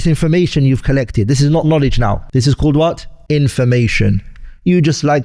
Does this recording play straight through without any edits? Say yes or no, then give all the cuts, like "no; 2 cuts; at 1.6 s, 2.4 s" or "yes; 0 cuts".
no; 2 cuts; at 2.2 s, 3.1 s